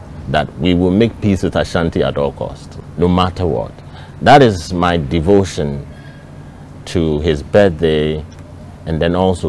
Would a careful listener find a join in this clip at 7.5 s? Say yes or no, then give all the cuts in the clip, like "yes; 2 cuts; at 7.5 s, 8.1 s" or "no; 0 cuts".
no; 1 cut; at 2.7 s